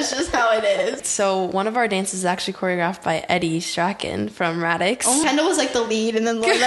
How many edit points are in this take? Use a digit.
2